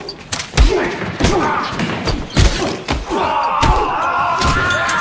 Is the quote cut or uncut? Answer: cut